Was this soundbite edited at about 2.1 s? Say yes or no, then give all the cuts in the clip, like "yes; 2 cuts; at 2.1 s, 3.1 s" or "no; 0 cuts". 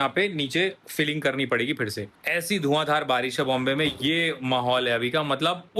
yes; 1 cut; at 2.1 s